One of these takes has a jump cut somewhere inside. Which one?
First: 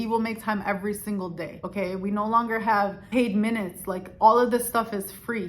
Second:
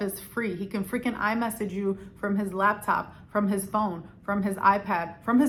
first; 1 cut; at 1.6 s

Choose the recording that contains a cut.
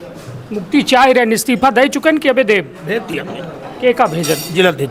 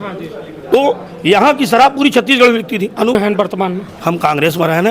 second; 1 cut; at 3.2 s

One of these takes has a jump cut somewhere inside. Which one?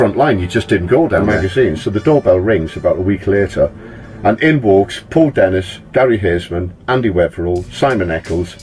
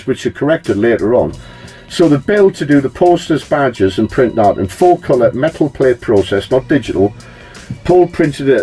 first; 1 cut; at 1.4 s

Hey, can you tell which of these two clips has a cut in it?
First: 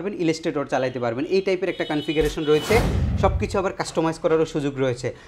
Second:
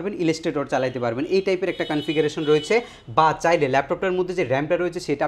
first; 1 cut; at 3.0 s

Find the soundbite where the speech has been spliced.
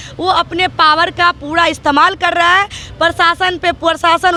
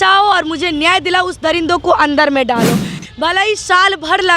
second; 1 cut; at 3.0 s

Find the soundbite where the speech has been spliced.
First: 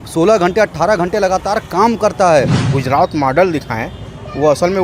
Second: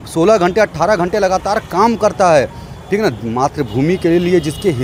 first; 1 cut; at 2.6 s

